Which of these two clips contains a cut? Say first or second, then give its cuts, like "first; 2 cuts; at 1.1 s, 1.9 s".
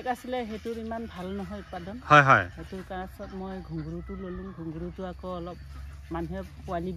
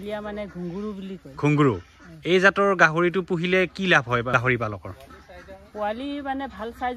second; 1 cut; at 4.3 s